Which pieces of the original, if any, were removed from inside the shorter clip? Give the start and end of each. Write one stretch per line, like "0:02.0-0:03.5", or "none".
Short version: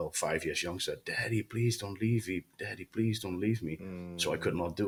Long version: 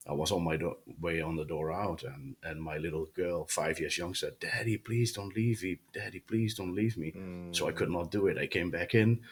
none